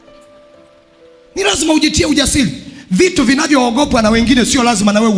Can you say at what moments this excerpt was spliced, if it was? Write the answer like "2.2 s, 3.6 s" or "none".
none